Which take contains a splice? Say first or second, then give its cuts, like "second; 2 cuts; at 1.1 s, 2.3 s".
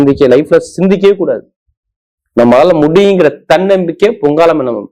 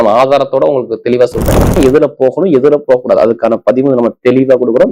second; 1 cut; at 1.8 s